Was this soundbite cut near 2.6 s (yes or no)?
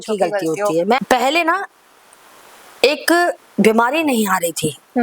no